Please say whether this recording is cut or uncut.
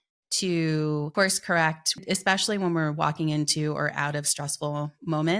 cut